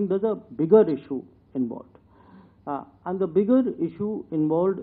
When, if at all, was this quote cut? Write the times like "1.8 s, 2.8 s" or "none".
none